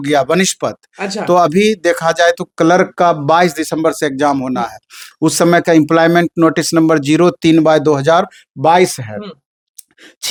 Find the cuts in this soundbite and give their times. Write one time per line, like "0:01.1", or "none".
none